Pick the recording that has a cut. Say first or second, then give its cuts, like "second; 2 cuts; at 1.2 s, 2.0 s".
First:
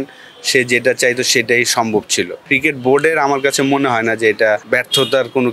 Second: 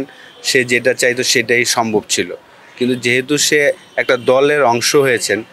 first; 2 cuts; at 2.4 s, 4.6 s